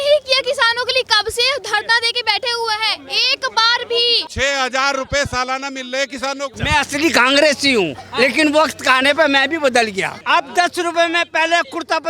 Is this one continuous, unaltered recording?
no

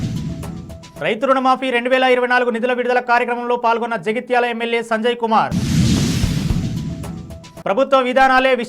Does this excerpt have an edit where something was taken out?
yes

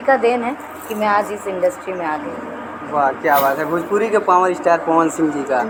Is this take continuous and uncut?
yes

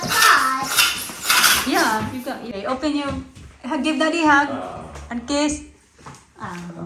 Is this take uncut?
no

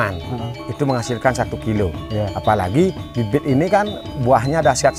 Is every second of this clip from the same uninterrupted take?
yes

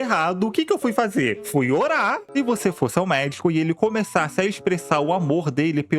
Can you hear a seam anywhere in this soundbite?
yes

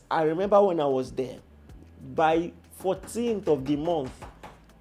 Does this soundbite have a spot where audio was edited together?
no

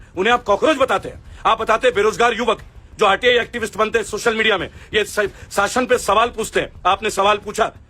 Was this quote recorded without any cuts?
yes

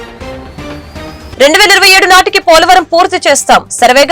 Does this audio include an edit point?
yes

